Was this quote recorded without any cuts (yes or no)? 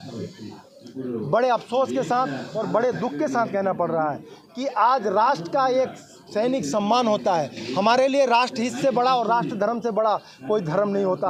yes